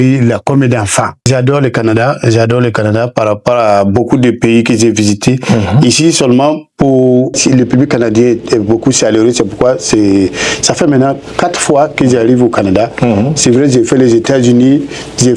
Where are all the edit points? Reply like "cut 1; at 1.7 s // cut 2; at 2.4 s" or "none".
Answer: cut 1; at 1.2 s // cut 2; at 7.4 s